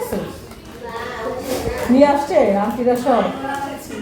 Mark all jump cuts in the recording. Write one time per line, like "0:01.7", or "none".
none